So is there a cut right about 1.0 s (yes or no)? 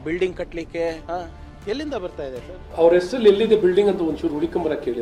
no